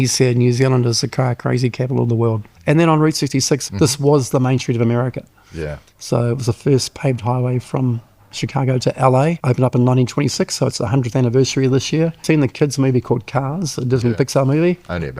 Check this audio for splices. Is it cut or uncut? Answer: cut